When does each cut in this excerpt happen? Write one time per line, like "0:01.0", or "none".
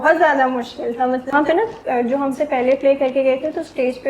0:01.3